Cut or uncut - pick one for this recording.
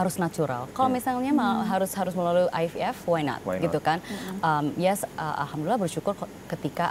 uncut